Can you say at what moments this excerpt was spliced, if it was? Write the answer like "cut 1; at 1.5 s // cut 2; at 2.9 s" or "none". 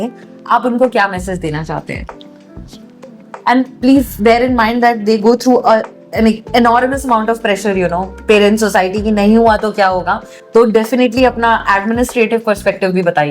none